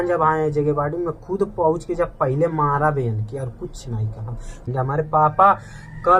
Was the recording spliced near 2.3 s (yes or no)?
no